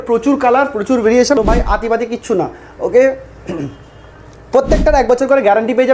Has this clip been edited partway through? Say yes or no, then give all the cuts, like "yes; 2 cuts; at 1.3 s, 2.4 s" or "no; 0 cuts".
yes; 1 cut; at 1.4 s